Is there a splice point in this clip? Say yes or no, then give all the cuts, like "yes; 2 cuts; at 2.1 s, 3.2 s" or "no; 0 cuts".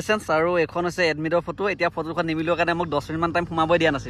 no; 0 cuts